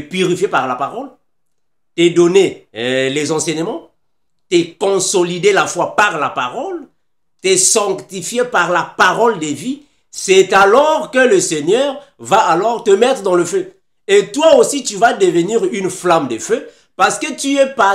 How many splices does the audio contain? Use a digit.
0